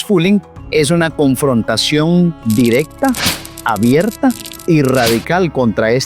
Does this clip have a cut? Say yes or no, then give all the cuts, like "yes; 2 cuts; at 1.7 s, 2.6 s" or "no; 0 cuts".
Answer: yes; 1 cut; at 2.4 s